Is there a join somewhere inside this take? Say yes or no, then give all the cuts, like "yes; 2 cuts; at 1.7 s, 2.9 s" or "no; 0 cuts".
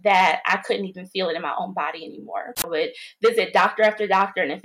yes; 1 cut; at 2.7 s